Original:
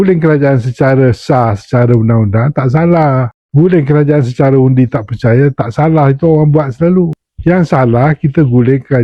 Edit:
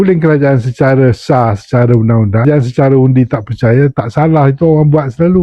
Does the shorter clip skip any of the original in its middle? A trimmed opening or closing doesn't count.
yes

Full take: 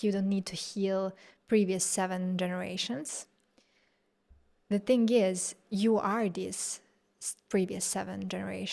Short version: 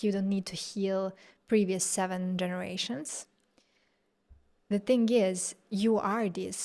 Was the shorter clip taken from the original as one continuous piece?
yes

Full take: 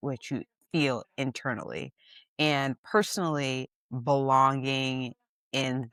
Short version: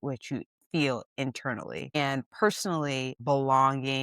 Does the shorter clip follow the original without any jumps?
no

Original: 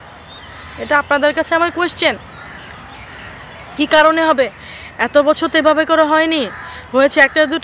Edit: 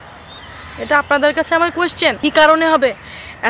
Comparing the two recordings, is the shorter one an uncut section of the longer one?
no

